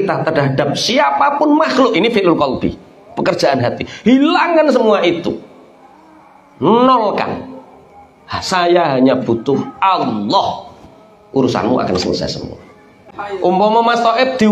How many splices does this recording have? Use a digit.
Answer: 1